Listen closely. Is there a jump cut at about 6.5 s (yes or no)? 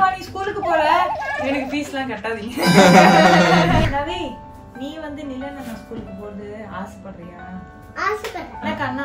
no